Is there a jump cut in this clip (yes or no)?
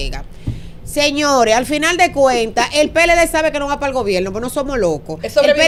no